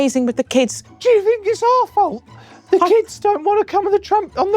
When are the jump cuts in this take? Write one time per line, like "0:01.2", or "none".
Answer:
0:01.0

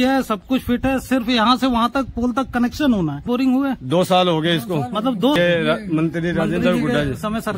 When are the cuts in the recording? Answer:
0:03.2
0:05.4

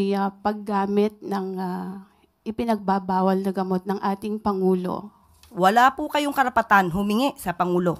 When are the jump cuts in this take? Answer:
0:05.5

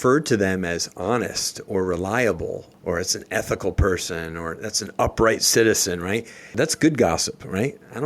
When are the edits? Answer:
0:02.7
0:06.6

